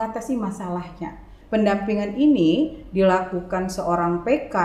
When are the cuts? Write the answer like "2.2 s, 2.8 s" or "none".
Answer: 1.3 s

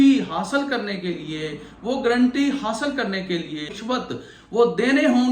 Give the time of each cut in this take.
3.7 s

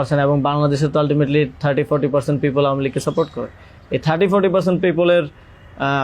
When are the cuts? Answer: none

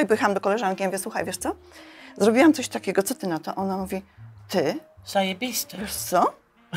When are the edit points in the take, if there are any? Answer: none

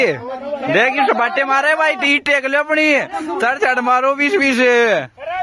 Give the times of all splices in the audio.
none

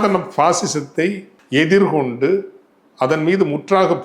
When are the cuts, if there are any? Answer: 1.3 s

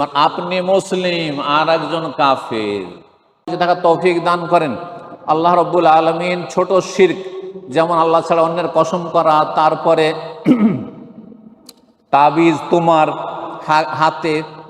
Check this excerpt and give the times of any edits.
3.5 s

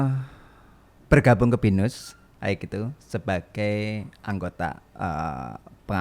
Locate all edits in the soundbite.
none

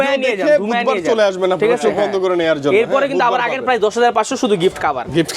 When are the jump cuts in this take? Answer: none

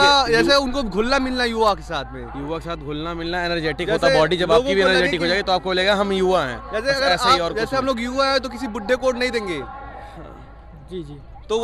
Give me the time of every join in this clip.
none

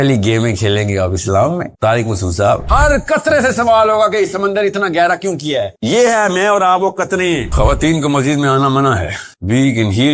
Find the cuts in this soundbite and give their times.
2.6 s, 7.5 s

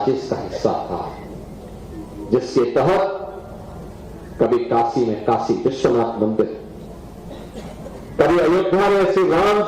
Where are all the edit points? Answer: 0.9 s

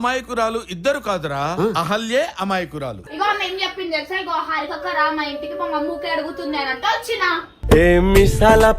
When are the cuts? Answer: 2.9 s

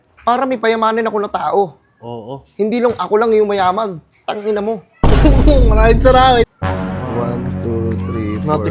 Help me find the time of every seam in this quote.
6.5 s

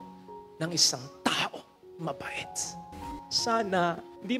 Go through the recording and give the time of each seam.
2.8 s

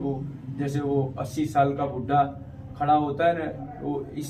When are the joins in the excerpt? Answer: none

